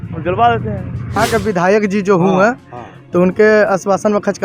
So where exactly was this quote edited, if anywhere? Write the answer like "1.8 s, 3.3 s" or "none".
1.2 s